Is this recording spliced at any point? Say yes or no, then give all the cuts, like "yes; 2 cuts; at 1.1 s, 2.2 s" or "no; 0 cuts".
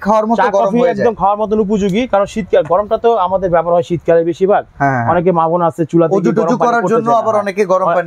no; 0 cuts